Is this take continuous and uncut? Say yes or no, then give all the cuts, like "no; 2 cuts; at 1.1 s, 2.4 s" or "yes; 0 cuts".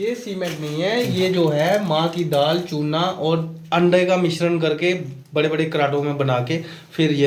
yes; 0 cuts